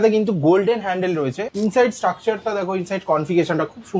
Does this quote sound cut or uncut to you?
cut